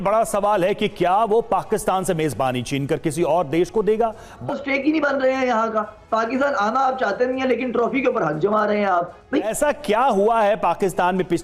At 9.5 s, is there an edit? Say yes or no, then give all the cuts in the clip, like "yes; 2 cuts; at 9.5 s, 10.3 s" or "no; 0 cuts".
yes; 2 cuts; at 4.5 s, 9.5 s